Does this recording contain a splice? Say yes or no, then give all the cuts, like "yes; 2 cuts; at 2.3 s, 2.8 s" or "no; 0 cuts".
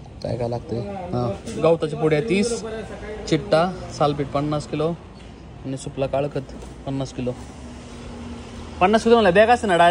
no; 0 cuts